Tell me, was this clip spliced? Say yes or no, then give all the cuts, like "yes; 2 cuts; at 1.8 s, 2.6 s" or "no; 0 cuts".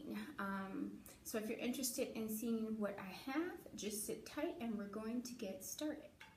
yes; 1 cut; at 5.5 s